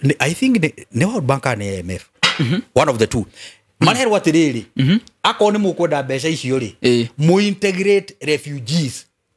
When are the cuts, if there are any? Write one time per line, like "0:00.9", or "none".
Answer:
none